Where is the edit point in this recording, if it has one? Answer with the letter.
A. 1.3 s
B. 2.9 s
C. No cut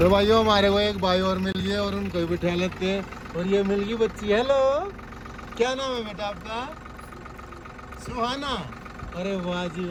C